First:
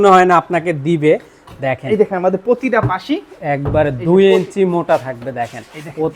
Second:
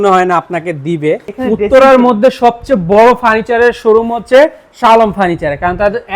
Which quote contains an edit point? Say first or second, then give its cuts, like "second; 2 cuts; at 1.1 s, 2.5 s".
second; 1 cut; at 1.3 s